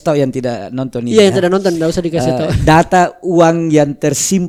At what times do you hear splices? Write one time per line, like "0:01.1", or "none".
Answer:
none

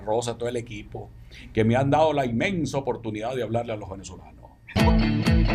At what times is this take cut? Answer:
0:04.6

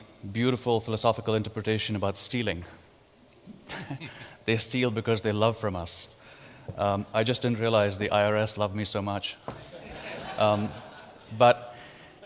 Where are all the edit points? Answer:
0:04.6

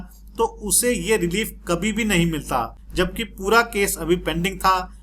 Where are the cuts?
0:02.8

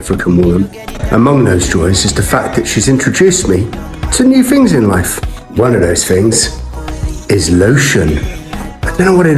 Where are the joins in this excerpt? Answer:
none

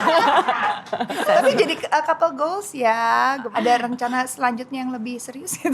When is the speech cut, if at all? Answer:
0:01.3
0:03.4

